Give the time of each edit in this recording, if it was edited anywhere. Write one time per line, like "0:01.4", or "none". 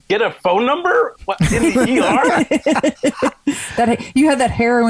none